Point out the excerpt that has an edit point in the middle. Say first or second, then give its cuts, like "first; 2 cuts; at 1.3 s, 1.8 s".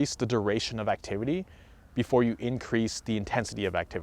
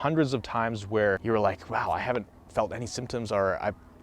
second; 1 cut; at 1.2 s